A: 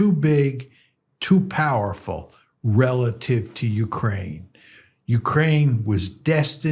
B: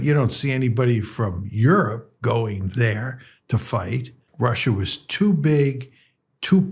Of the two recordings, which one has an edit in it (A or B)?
B